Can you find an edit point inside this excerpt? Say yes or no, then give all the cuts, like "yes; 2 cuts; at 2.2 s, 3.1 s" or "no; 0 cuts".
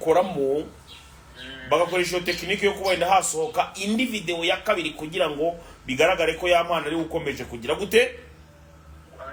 no; 0 cuts